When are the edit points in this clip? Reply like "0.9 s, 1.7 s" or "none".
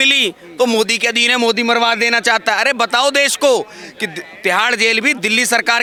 none